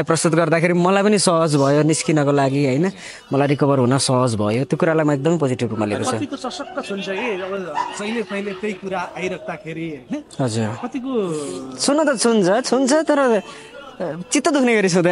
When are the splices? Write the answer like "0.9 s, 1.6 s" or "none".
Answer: none